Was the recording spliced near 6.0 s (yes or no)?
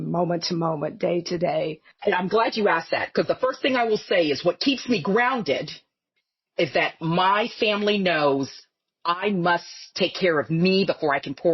no